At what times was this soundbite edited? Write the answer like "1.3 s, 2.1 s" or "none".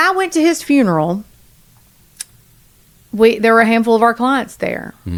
none